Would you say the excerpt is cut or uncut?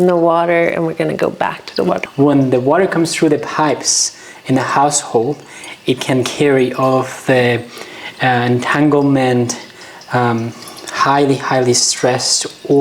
cut